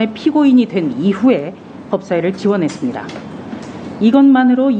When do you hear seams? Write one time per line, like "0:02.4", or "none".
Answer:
none